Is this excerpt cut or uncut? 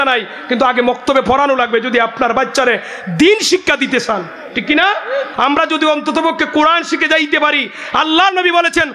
cut